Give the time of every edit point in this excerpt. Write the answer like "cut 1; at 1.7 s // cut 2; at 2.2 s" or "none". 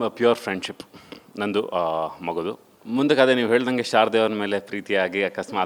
cut 1; at 2.7 s